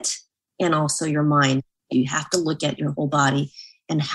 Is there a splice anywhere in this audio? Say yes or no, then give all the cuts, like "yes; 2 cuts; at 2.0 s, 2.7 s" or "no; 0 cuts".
yes; 1 cut; at 1.9 s